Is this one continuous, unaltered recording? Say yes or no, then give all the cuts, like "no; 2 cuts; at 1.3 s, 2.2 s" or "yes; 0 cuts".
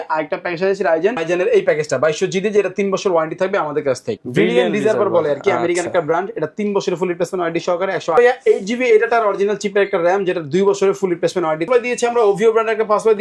no; 4 cuts; at 1.1 s, 4.2 s, 8.2 s, 11.6 s